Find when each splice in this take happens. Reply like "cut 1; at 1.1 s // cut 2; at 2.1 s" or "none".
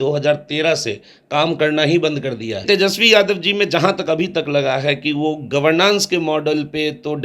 cut 1; at 2.6 s